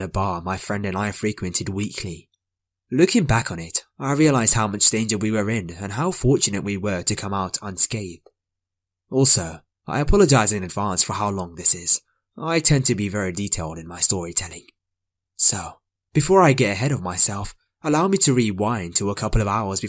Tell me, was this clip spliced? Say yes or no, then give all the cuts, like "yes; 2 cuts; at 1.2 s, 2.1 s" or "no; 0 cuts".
yes; 1 cut; at 5.5 s